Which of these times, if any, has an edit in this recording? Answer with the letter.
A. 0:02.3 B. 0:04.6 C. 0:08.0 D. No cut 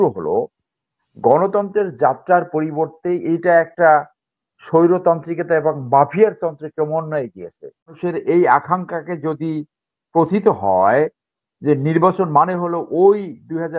C